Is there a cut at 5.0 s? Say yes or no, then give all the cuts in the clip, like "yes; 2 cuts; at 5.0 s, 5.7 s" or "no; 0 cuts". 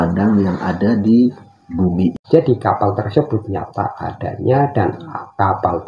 no; 1 cut; at 2.2 s